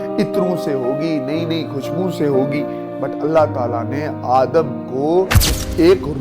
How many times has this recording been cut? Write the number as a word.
one